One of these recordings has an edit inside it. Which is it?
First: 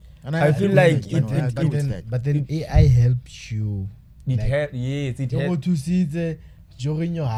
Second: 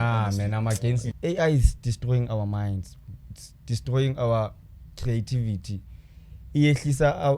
second; 1 cut; at 1.0 s

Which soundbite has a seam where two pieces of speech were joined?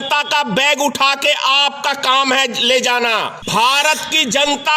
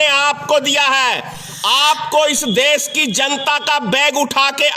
first; 1 cut; at 3.4 s

